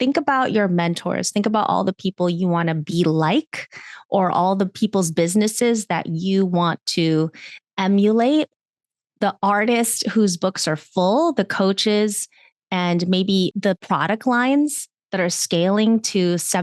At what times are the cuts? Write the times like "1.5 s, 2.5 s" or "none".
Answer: none